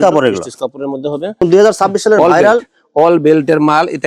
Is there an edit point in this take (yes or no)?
yes